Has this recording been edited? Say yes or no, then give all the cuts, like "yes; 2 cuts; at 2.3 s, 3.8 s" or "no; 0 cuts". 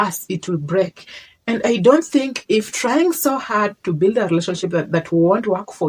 no; 0 cuts